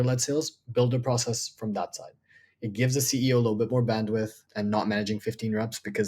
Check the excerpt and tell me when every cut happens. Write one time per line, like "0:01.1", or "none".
0:04.4